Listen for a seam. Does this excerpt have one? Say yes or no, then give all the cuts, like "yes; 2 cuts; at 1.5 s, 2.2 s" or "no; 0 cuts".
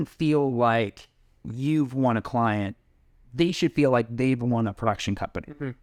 no; 0 cuts